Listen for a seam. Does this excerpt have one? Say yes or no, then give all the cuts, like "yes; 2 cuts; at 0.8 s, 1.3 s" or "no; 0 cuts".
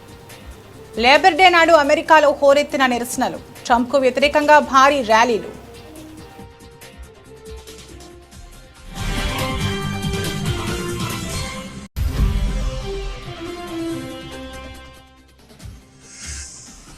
yes; 2 cuts; at 1.0 s, 5.6 s